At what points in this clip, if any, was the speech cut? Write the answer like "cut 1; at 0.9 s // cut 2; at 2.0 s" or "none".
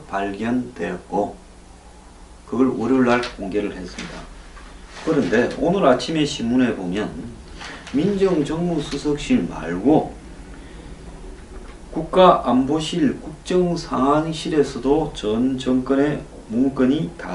cut 1; at 8.0 s